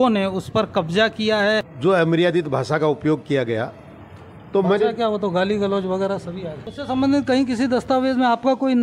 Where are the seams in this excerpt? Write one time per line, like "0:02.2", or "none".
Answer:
0:01.7
0:06.7